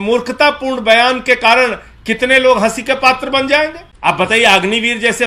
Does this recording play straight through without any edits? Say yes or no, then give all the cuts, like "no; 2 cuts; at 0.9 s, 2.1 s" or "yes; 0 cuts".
no; 1 cut; at 3.9 s